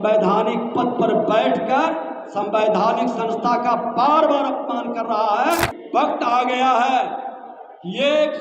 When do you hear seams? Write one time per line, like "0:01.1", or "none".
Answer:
0:05.8